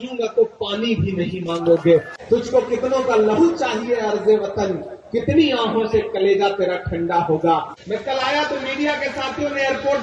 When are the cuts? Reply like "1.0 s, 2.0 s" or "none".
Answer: 2.1 s, 7.7 s